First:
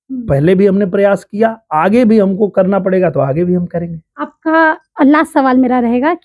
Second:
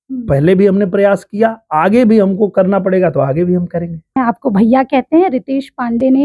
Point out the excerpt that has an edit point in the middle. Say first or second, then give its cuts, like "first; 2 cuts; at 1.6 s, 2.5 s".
second; 1 cut; at 4.2 s